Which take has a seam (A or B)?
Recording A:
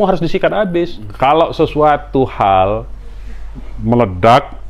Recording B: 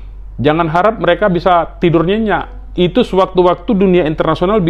A